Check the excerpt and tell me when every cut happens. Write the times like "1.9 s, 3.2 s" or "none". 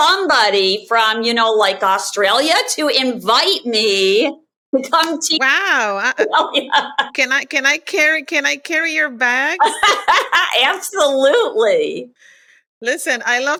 none